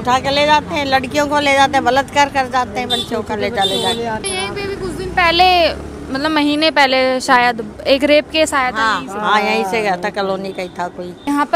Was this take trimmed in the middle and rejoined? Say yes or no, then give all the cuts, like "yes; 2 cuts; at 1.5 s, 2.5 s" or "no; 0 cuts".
no; 0 cuts